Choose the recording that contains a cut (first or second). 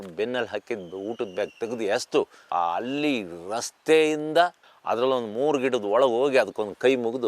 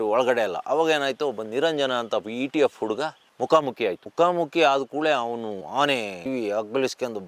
first